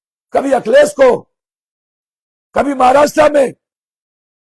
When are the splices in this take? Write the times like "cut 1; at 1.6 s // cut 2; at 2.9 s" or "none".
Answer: none